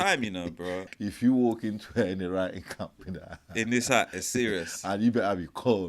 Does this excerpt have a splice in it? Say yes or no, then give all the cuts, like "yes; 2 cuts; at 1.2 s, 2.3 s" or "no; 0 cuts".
yes; 1 cut; at 0.9 s